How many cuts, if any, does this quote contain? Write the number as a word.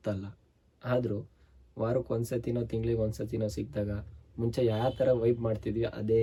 zero